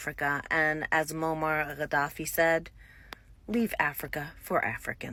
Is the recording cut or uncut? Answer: uncut